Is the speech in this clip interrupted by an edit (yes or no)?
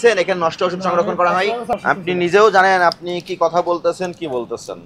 yes